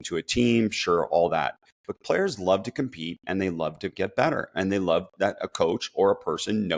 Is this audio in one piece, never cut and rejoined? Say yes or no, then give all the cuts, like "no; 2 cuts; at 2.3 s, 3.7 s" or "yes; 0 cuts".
yes; 0 cuts